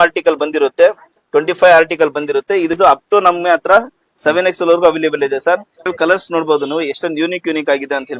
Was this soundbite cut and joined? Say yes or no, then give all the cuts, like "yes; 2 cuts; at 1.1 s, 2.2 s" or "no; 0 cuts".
yes; 2 cuts; at 2.7 s, 5.9 s